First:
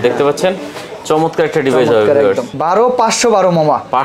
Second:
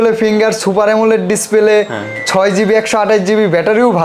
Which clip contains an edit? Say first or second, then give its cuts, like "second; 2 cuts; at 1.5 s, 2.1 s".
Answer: first; 1 cut; at 2.5 s